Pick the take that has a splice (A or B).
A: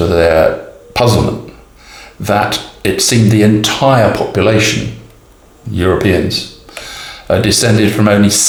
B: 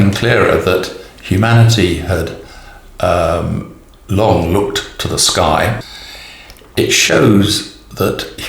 B